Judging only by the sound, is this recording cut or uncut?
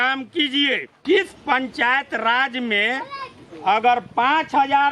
cut